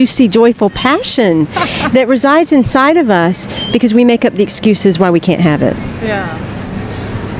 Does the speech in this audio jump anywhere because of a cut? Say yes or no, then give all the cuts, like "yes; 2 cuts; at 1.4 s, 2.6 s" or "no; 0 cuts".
no; 0 cuts